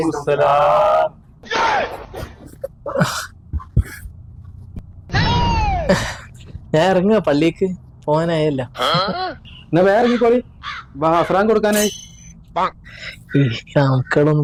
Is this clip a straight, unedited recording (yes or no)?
yes